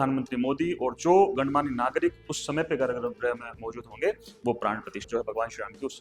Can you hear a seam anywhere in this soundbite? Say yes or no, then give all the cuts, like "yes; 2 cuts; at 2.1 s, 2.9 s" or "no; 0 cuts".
yes; 1 cut; at 5.1 s